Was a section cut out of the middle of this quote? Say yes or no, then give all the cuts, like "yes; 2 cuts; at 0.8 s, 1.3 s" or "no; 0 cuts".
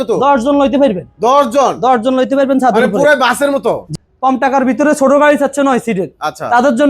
yes; 1 cut; at 3.9 s